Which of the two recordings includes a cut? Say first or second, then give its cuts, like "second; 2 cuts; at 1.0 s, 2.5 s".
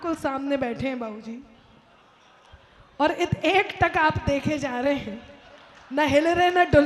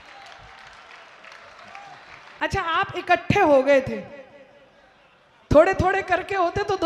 second; 1 cut; at 2.3 s